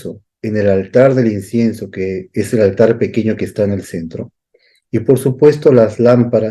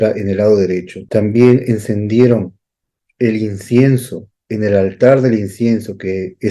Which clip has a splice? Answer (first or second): second